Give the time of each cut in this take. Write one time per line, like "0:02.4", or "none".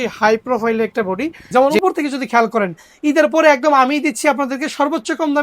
0:01.5

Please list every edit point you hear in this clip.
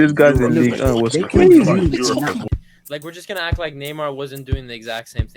0:02.3

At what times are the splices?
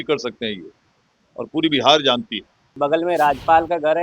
0:02.7

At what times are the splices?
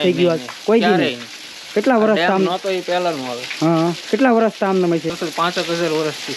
0:05.2

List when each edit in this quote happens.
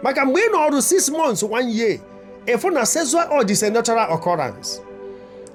none

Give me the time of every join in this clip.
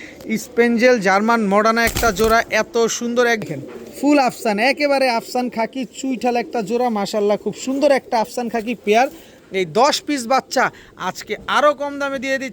0:03.4
0:09.3

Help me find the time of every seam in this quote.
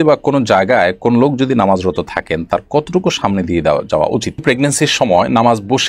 0:04.4

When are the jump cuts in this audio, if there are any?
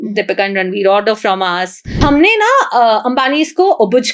0:02.0

